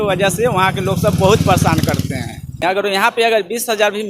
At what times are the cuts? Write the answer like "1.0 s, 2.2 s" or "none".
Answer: 2.7 s